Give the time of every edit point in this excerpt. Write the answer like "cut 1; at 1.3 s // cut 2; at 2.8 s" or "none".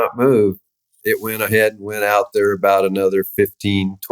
cut 1; at 1.0 s

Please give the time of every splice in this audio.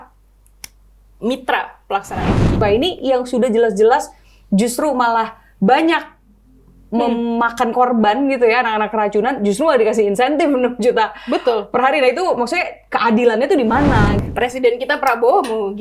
cut 1; at 2.5 s // cut 2; at 14.2 s

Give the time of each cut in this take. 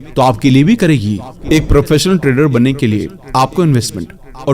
cut 1; at 1.3 s

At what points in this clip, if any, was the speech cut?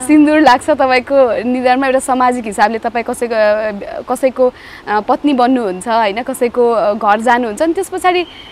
none

